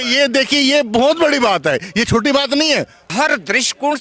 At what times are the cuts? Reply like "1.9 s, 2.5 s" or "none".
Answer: 3.0 s